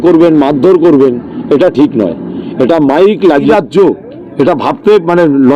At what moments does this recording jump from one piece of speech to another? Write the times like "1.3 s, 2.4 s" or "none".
3.4 s